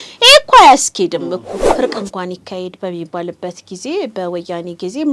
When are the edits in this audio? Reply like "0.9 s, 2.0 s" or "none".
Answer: 1.6 s